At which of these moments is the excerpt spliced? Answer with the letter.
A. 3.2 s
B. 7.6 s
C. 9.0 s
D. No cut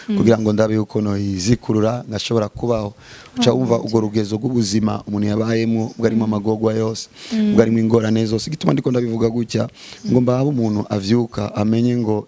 D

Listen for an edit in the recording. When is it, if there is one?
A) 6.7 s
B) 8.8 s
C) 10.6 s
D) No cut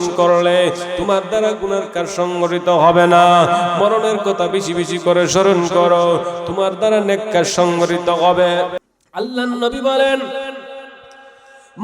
B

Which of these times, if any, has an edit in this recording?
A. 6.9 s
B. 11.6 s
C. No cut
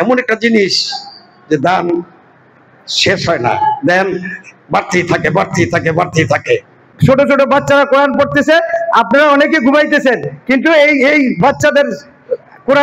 A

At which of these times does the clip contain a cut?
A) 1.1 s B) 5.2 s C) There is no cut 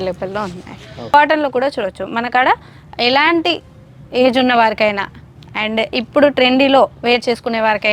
A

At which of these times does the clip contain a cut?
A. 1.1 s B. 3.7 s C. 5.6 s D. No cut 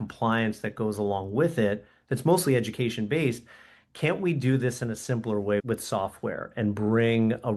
C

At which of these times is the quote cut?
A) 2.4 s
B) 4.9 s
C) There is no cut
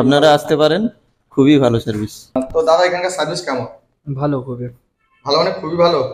A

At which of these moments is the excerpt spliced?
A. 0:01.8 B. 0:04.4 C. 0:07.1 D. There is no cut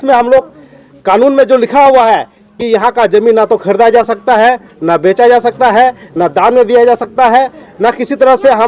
D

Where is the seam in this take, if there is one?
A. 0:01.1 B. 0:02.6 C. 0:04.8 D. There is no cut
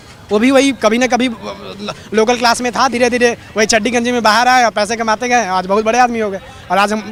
D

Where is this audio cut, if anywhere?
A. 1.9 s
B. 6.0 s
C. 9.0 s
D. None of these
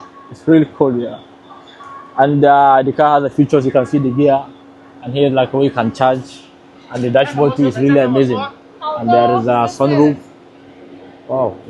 D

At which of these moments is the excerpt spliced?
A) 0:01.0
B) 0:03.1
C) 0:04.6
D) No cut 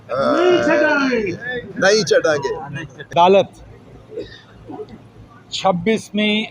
B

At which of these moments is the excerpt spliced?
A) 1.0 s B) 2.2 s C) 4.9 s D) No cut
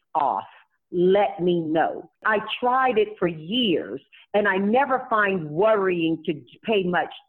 B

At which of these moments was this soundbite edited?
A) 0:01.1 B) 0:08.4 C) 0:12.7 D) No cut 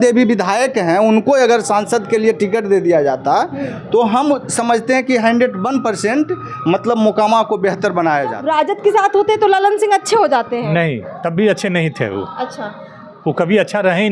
B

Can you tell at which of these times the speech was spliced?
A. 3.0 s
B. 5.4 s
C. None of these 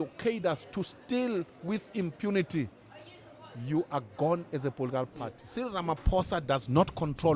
B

